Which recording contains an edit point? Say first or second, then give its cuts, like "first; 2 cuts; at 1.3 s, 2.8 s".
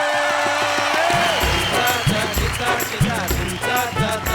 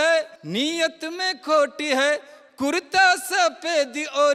first; 1 cut; at 1.5 s